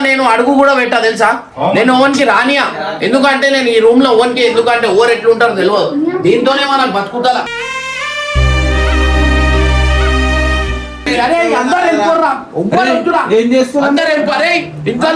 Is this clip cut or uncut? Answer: cut